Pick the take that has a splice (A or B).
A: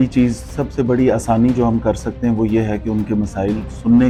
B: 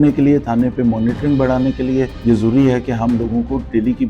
B